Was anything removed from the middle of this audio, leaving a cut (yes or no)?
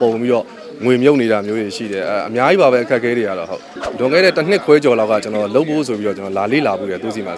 yes